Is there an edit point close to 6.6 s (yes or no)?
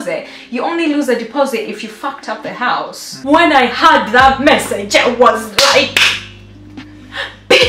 no